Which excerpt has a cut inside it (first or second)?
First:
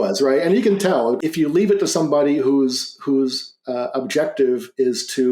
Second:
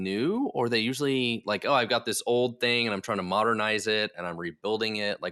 first